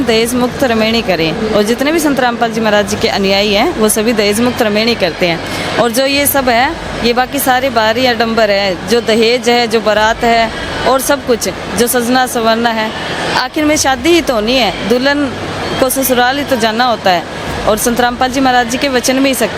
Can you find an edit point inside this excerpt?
no; 0 cuts

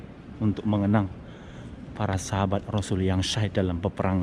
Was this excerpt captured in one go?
yes; 0 cuts

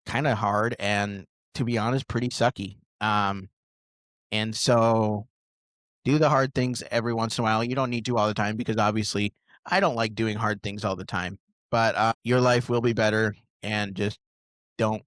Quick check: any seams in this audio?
no; 0 cuts

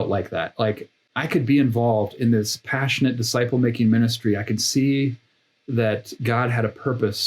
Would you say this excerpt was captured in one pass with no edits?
no; 1 cut; at 1.0 s

